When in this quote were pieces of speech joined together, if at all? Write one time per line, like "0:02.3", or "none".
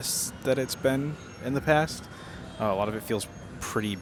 none